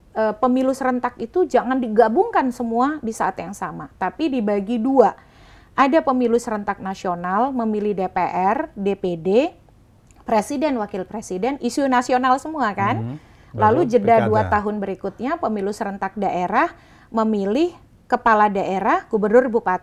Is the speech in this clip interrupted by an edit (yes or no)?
no